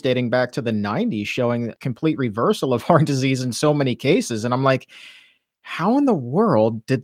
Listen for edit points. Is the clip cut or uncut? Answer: cut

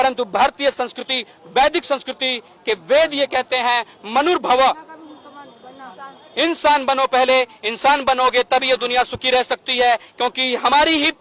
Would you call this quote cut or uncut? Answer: uncut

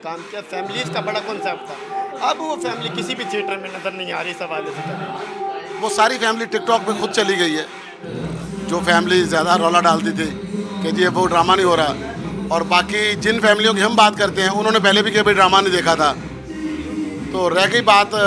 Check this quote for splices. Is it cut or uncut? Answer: uncut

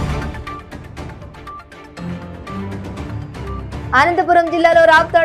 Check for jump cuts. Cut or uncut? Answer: cut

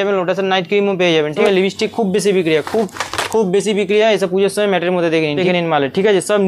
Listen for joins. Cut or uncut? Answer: cut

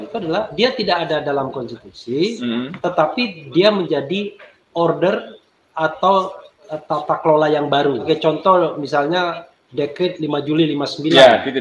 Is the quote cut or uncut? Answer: cut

